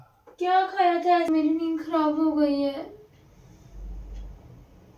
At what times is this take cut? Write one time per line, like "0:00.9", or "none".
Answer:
0:01.3

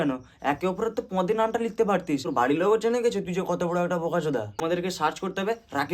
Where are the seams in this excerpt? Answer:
0:02.3
0:04.6

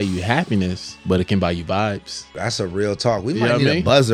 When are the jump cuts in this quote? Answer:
0:00.9
0:02.2

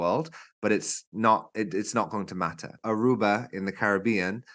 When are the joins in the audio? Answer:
0:02.8

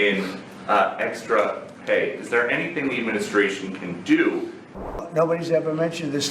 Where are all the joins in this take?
0:05.0

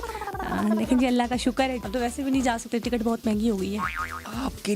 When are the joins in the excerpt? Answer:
0:01.8

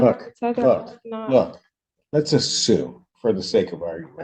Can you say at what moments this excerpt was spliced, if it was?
none

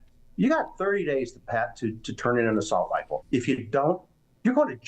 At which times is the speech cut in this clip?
0:03.2

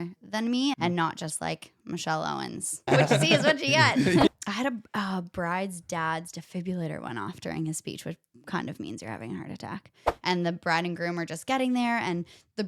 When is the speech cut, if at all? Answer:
0:00.8
0:02.9
0:04.3
0:10.1

